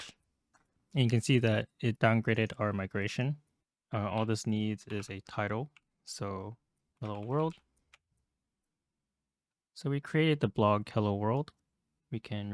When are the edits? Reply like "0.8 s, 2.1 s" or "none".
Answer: 3.6 s